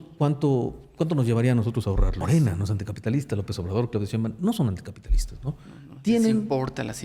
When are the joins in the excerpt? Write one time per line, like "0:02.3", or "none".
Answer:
0:02.2